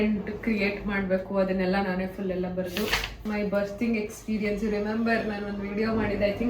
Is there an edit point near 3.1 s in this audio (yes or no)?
yes